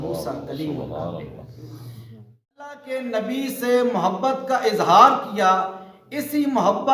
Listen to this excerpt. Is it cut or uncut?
cut